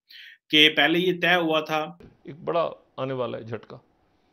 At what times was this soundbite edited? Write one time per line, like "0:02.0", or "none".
0:02.0